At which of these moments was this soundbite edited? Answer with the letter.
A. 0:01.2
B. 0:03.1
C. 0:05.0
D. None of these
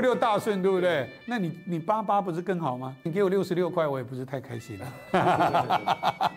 B